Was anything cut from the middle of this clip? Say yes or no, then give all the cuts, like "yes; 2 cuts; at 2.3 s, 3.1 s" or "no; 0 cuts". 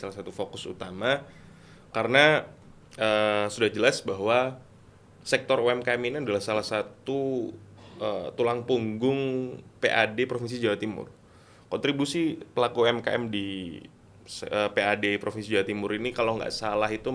no; 0 cuts